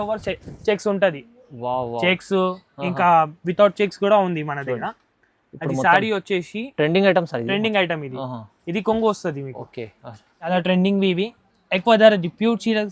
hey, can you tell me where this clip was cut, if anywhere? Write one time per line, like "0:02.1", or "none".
0:10.5